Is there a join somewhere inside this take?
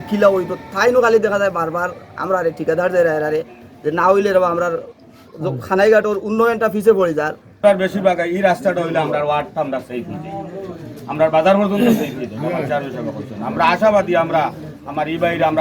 yes; 1 cut; at 7.4 s

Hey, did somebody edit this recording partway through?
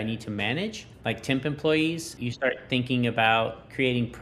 yes; 2 cuts; at 0.9 s, 2.2 s

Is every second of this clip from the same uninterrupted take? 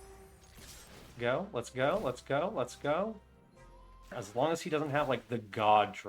no; 1 cut; at 4.2 s

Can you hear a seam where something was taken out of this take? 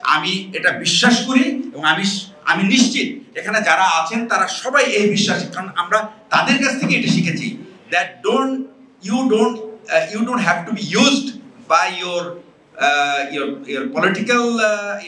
no; 0 cuts

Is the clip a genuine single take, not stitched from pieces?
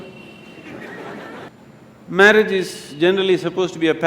no; 1 cut; at 1.5 s

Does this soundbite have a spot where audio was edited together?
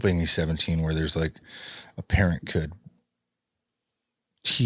no; 0 cuts

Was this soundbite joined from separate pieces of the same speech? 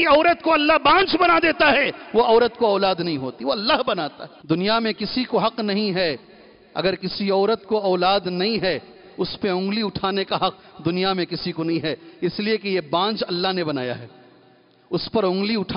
yes; 1 cut; at 4.3 s

